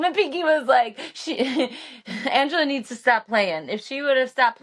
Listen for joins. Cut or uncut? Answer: uncut